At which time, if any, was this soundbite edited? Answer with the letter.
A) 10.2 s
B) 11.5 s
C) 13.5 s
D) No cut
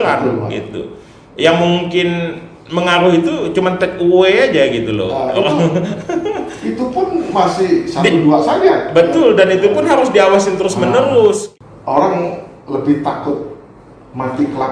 B